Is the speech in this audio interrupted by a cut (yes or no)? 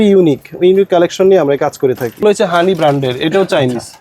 yes